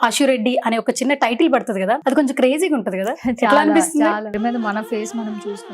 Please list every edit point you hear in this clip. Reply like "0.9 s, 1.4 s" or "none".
2.0 s, 4.4 s